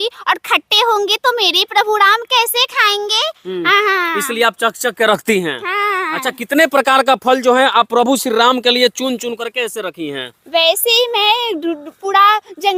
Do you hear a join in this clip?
no; 0 cuts

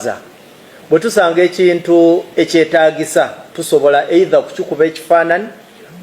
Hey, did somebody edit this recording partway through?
yes; 1 cut; at 3.5 s

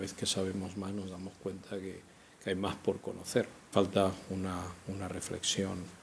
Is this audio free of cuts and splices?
yes; 0 cuts

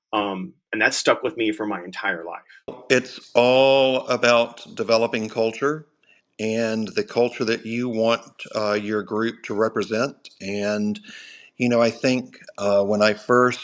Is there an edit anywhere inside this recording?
yes; 1 cut; at 2.8 s

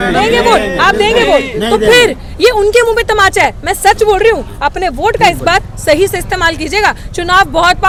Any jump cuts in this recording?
no; 0 cuts

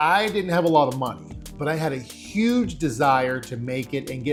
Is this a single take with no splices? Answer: yes; 0 cuts

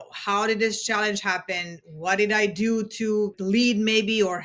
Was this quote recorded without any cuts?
no; 1 cut; at 3.4 s

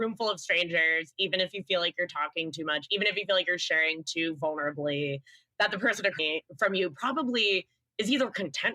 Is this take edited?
no; 0 cuts

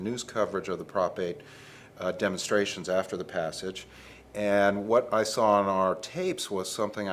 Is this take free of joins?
yes; 0 cuts

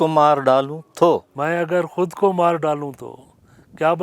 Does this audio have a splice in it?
yes; 1 cut; at 1.3 s

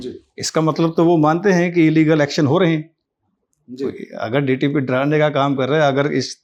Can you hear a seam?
no; 0 cuts

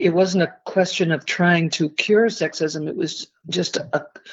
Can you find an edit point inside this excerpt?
no; 0 cuts

